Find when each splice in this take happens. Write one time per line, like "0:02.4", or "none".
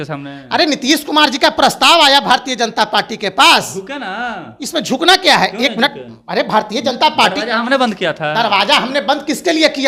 none